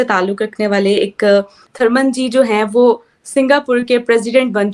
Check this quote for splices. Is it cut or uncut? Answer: cut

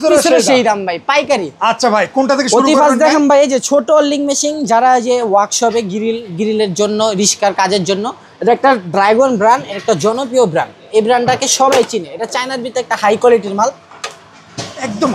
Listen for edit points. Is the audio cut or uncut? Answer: uncut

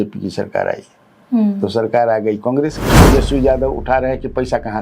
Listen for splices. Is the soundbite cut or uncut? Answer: cut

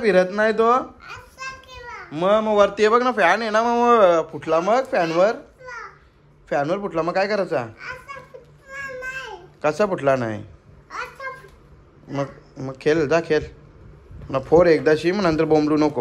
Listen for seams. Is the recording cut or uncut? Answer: uncut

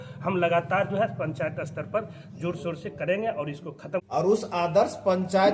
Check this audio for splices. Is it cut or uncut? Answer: cut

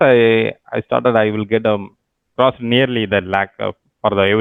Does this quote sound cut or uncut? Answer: uncut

